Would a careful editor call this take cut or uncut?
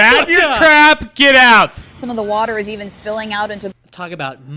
cut